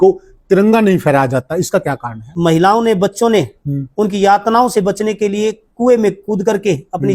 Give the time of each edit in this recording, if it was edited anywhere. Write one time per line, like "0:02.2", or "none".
0:02.3